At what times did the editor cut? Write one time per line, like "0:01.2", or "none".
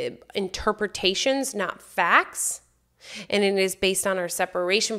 none

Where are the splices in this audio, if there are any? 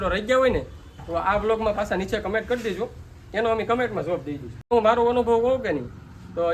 0:04.7

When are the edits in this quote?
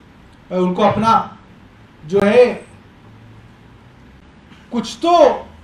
none

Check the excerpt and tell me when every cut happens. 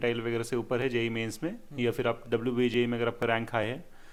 none

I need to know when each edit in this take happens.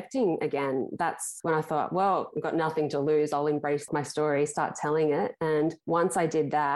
0:01.3
0:03.9
0:05.8

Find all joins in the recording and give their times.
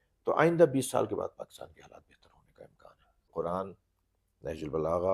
0:03.3

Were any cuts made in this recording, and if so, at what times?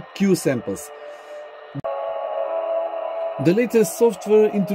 0:01.8

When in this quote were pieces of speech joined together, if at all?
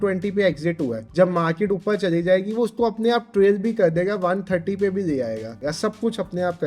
0:01.0
0:05.6

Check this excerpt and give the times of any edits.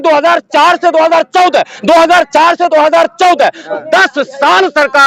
none

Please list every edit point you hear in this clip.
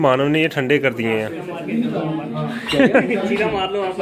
0:01.6

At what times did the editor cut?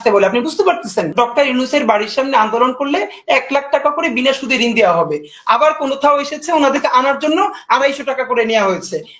0:01.1

